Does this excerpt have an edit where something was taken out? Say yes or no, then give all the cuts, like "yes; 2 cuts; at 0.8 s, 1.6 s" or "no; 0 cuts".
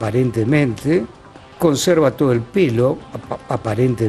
no; 0 cuts